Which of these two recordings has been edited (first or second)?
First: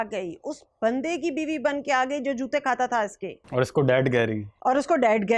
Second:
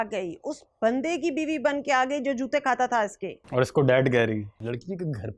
second